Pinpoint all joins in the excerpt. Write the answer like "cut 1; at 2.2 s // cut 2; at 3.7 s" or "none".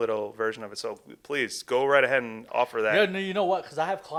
none